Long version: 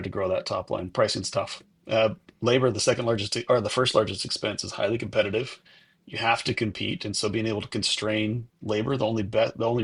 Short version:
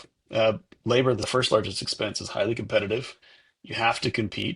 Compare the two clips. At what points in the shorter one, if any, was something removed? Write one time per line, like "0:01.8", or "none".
0:01.2